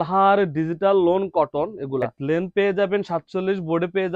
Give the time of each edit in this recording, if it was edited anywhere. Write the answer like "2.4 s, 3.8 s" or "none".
2.1 s